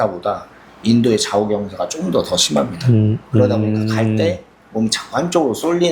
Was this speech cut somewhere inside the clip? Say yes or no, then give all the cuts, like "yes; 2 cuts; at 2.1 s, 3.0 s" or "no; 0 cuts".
no; 0 cuts